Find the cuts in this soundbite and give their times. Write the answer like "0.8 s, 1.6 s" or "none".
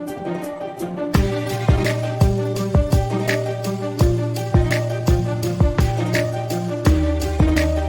none